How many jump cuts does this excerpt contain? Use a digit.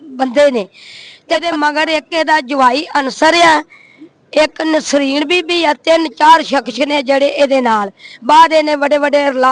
1